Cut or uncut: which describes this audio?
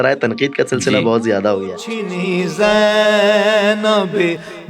cut